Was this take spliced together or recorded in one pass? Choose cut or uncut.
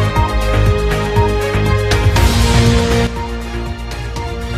cut